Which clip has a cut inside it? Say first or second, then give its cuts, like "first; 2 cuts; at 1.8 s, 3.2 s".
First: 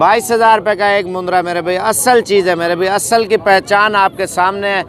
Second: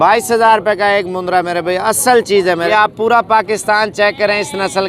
second; 1 cut; at 2.7 s